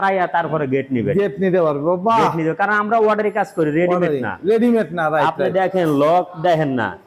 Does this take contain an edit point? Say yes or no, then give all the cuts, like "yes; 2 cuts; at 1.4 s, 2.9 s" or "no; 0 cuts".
no; 0 cuts